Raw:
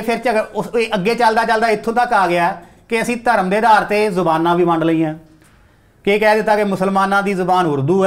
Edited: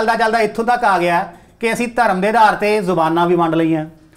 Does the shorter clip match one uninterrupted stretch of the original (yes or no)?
yes